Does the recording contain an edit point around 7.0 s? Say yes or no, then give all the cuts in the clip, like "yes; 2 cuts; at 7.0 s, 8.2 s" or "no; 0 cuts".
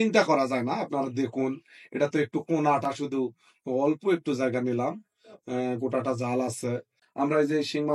yes; 1 cut; at 7.0 s